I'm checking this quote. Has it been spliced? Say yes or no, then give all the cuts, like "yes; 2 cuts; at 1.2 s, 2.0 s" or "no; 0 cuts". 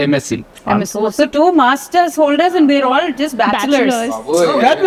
no; 0 cuts